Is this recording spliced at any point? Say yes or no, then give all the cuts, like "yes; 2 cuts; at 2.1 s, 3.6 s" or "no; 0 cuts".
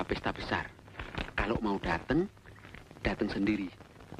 no; 0 cuts